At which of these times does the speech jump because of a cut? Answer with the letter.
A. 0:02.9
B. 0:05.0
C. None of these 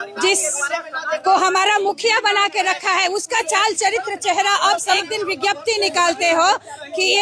B